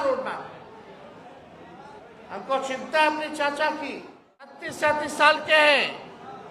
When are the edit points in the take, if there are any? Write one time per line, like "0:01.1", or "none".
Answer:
0:04.6